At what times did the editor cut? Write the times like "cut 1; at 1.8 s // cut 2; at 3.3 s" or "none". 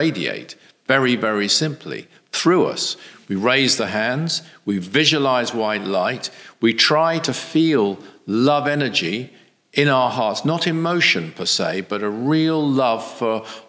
none